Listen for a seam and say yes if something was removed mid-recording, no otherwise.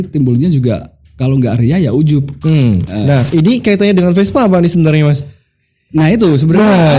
yes